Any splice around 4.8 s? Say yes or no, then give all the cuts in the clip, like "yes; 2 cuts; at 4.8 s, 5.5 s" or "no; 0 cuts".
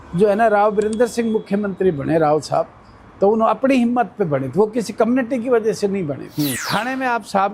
no; 1 cut; at 6.6 s